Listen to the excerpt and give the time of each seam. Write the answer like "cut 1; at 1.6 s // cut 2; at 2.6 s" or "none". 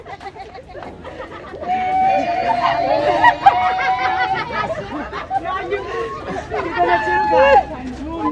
none